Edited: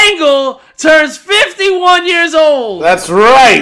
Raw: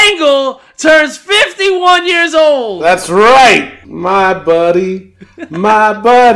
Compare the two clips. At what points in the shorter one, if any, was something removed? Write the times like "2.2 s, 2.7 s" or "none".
none